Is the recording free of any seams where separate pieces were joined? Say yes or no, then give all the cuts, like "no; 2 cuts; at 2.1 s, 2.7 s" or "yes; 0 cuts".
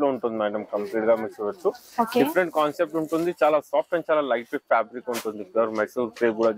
yes; 0 cuts